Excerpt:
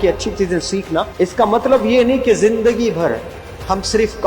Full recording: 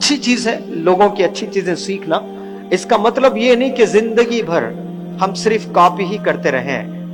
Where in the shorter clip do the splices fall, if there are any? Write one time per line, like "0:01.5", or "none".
0:01.1